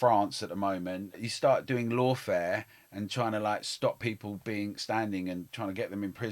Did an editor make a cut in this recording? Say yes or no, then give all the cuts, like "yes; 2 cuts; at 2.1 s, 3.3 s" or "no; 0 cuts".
yes; 1 cut; at 1.3 s